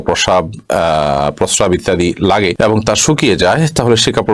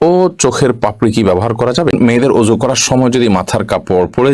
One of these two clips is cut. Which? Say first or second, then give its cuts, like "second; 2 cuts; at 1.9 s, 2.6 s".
second; 1 cut; at 1.9 s